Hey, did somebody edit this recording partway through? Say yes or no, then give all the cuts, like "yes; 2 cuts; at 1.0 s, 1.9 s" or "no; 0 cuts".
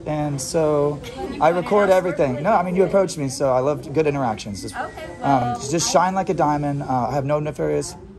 no; 0 cuts